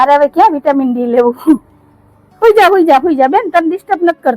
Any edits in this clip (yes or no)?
no